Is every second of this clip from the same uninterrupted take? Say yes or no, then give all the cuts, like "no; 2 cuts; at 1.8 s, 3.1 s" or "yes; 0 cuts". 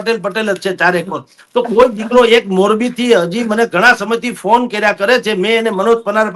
yes; 0 cuts